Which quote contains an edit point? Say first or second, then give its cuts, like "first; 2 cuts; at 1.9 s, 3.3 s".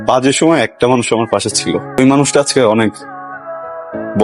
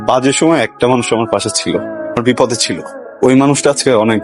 first; 1 cut; at 2.0 s